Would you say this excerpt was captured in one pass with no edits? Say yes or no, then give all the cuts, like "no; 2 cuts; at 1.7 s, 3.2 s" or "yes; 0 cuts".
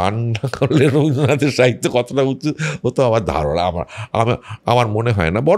yes; 0 cuts